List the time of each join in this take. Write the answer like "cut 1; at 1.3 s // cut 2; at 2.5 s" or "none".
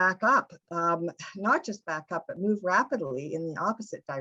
none